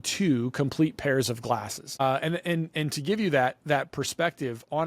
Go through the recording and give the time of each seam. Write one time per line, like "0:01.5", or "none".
0:02.0